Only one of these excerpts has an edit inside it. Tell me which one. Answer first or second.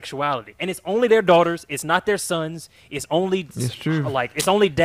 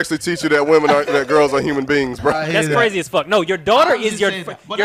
second